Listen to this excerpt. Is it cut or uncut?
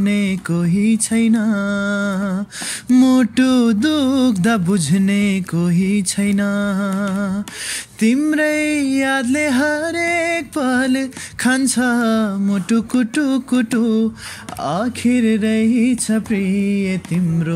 uncut